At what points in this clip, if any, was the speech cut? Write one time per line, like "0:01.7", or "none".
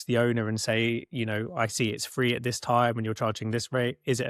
none